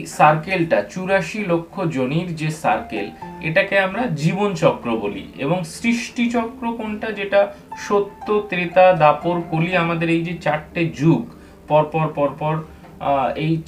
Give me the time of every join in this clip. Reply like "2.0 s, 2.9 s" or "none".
none